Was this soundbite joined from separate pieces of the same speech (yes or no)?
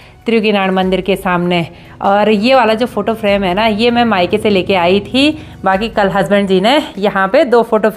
no